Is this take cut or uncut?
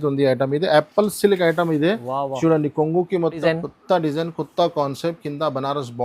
cut